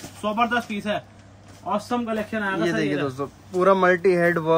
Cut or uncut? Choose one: uncut